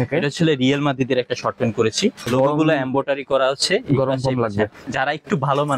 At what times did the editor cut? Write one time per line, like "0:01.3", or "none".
0:02.3
0:04.8